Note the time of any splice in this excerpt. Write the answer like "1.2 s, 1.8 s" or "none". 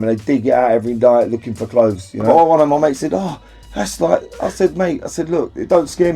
2.3 s